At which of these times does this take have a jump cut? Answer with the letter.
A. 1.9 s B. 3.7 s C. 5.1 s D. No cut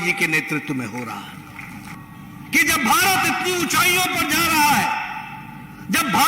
A